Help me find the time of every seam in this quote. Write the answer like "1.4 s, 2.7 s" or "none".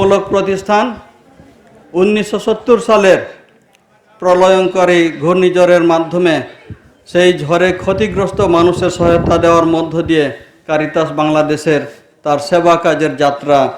none